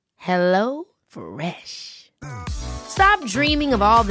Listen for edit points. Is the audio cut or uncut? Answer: uncut